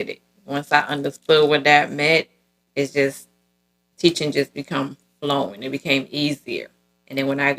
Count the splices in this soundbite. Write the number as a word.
zero